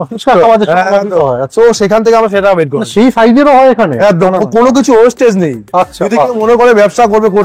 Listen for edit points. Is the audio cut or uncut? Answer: uncut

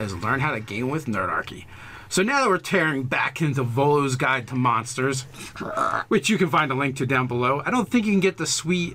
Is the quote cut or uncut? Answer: cut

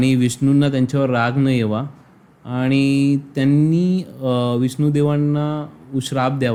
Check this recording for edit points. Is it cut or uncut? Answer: uncut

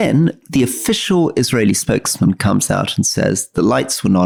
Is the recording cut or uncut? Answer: uncut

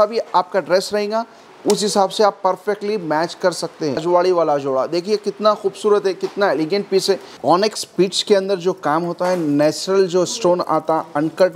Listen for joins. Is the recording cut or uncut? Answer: cut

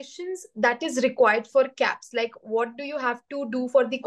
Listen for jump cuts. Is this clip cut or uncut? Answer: uncut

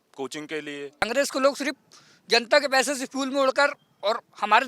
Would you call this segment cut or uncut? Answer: cut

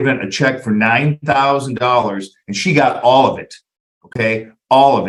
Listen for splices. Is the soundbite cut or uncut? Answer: uncut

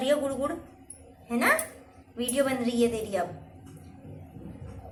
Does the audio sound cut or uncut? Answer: uncut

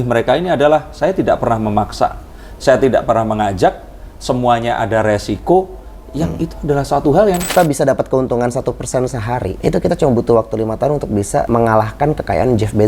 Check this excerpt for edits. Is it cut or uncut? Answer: cut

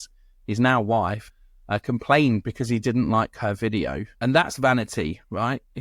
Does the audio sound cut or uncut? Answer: cut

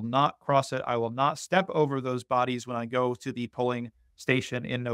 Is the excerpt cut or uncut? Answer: uncut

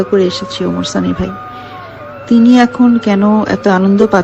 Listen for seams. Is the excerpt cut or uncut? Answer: uncut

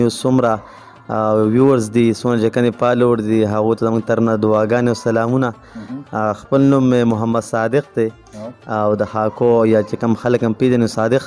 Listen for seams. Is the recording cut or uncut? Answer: uncut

